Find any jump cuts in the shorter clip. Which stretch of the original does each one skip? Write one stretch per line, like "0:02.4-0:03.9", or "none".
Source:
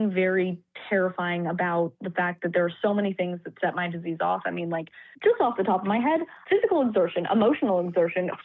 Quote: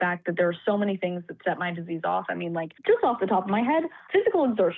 0:04.9-0:05.1

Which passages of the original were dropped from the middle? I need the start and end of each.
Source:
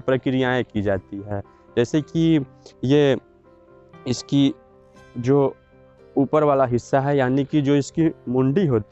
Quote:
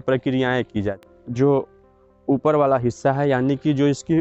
0:01.1-0:05.0

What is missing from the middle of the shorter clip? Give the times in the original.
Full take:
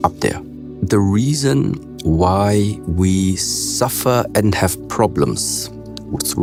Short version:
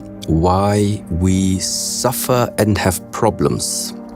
none

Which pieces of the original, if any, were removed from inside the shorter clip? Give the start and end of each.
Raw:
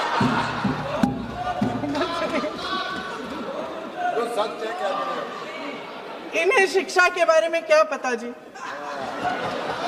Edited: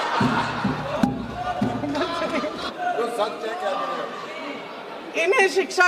0:02.6-0:03.8

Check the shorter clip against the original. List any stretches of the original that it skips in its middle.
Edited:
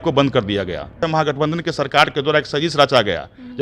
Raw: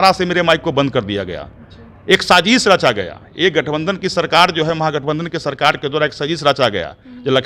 0:01.6-0:04.7

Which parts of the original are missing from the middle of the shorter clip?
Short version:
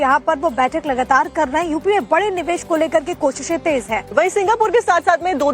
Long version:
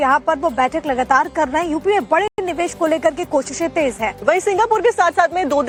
0:02.3-0:02.4

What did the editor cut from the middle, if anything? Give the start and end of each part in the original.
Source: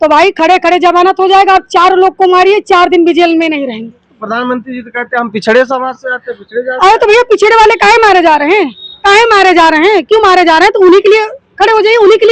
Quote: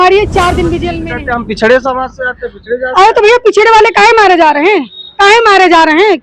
0:03.3-0:04.8

